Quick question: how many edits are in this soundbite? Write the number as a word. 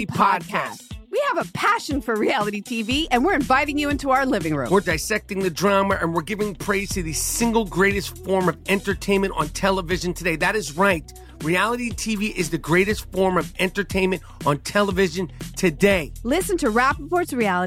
zero